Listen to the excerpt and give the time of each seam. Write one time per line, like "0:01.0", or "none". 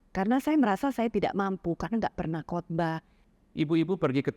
0:03.1